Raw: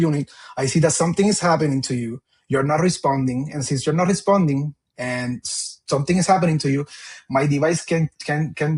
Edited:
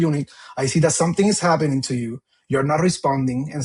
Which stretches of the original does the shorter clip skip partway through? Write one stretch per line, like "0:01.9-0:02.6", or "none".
none